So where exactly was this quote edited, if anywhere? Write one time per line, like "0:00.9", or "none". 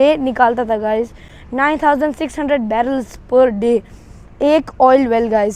none